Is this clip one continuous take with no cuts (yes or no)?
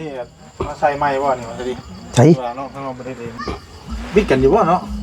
no